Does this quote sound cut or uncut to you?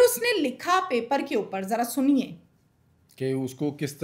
uncut